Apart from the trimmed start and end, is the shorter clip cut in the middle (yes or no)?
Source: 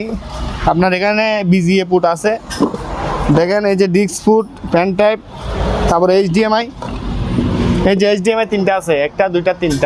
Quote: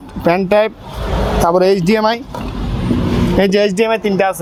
no